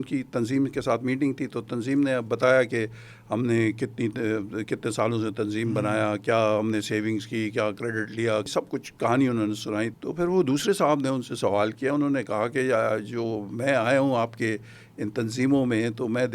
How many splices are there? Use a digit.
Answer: 2